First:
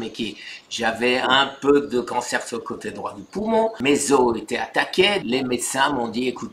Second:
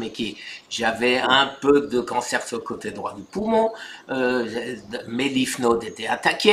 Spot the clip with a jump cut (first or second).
first